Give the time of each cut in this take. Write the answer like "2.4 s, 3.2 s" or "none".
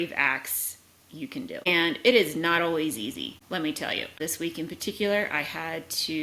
1.7 s, 3.4 s, 4.2 s